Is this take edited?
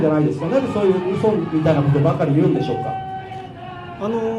no; 0 cuts

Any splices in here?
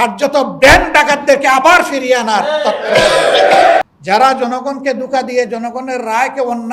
yes; 1 cut; at 3.8 s

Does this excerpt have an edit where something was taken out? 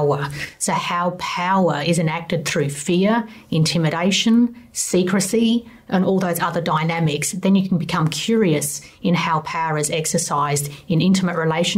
no; 0 cuts

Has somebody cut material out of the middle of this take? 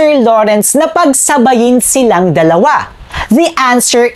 no; 0 cuts

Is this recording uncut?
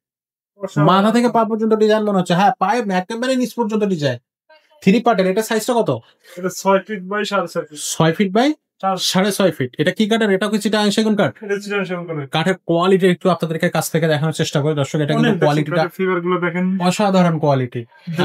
yes; 0 cuts

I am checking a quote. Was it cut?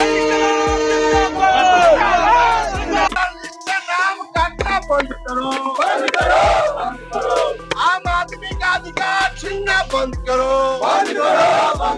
no; 0 cuts

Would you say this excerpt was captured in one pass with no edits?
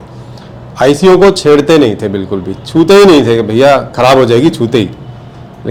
yes; 0 cuts

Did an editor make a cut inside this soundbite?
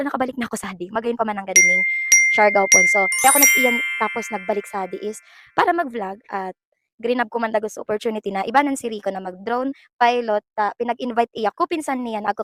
no; 0 cuts

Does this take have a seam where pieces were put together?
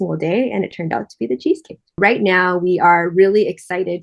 yes; 1 cut; at 2.0 s

